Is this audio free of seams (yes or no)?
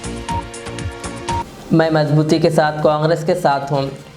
no